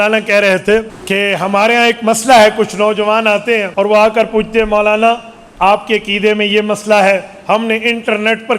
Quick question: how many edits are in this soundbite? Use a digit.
2